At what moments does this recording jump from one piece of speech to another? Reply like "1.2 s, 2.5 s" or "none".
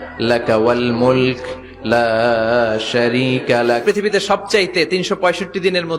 3.8 s